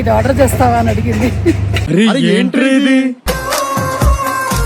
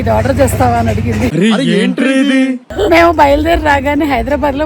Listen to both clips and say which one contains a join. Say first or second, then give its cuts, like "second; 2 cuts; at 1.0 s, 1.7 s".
second; 2 cuts; at 1.3 s, 2.7 s